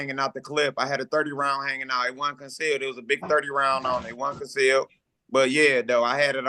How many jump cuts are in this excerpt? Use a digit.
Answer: 0